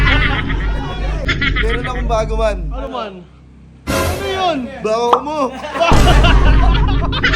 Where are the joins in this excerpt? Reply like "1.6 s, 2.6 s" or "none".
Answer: 1.3 s